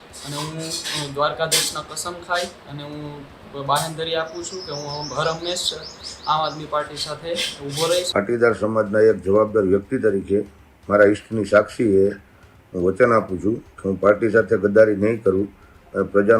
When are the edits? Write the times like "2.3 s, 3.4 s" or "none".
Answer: 8.1 s